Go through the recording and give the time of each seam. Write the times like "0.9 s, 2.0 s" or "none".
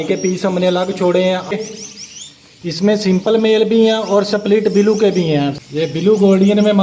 1.5 s, 5.6 s